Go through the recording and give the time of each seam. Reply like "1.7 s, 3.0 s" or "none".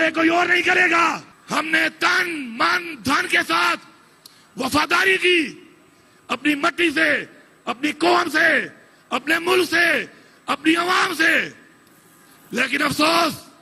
1.3 s